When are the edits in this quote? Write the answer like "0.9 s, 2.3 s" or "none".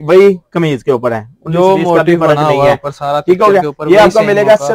none